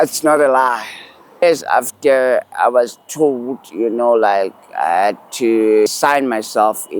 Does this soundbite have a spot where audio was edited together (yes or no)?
yes